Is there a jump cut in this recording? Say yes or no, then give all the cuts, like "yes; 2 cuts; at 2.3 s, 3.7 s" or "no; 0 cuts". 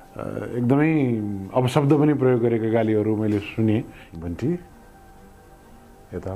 yes; 1 cut; at 4.0 s